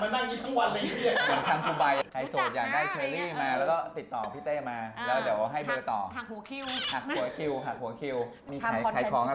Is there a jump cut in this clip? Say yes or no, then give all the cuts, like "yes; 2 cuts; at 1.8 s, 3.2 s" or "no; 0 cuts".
yes; 2 cuts; at 2.0 s, 8.5 s